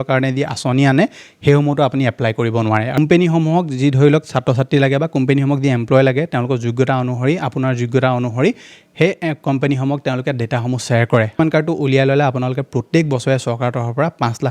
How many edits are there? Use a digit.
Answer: 2